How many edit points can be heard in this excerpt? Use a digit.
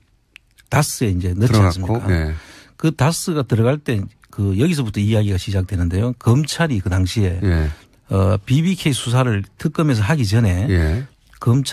0